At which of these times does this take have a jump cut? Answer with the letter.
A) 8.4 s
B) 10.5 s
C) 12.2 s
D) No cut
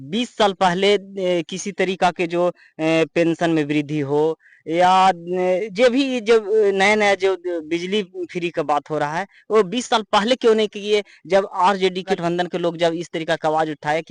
C